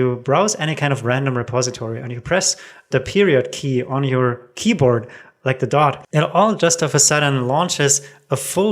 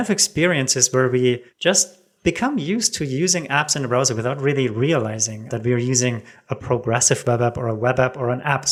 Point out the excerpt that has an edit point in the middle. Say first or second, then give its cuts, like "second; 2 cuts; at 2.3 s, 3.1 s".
first; 1 cut; at 6.0 s